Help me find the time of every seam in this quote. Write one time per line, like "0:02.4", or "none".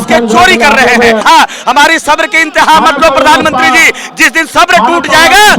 0:01.2